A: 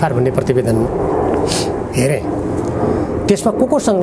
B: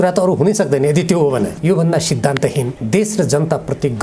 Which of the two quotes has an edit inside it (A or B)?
B